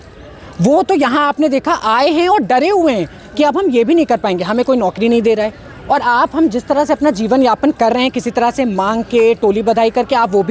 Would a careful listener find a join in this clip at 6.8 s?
no; 0 cuts

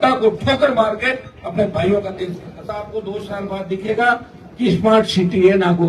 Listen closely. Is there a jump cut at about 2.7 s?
yes; 1 cut; at 2.7 s

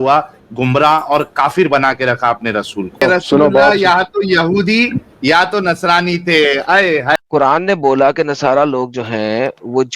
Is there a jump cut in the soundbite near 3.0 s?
yes; 2 cuts; at 3.0 s, 7.1 s

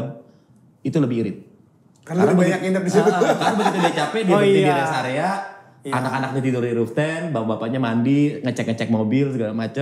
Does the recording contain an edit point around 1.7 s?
no; 0 cuts

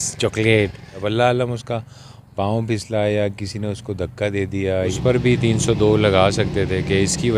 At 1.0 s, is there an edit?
yes; 2 cuts; at 1.0 s, 4.9 s

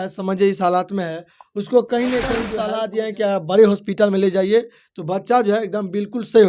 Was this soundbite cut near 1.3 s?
no; 1 cut; at 2.6 s

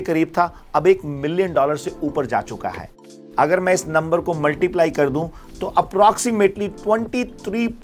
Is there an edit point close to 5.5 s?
no; 1 cut; at 3.2 s

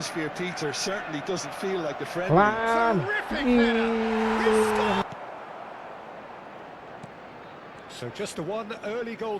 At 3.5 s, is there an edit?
no; 1 cut; at 5.1 s

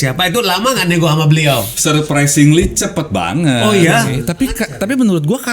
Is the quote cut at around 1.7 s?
yes; 2 cuts; at 1.7 s, 4.2 s

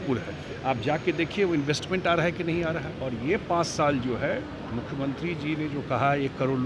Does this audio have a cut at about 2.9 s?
yes; 1 cut; at 2.9 s

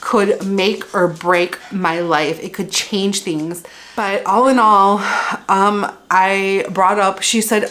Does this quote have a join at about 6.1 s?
no; 1 cut; at 3.9 s

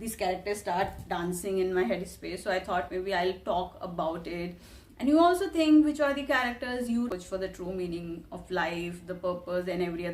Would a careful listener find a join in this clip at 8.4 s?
no; 1 cut; at 7.1 s

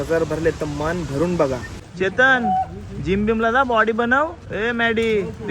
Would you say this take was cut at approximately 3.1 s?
no; 1 cut; at 1.8 s

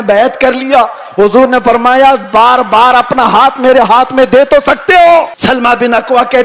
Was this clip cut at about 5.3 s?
yes; 1 cut; at 5.3 s

